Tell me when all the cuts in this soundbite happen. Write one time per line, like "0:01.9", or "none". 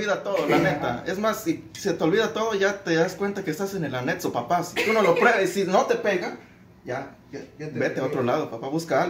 none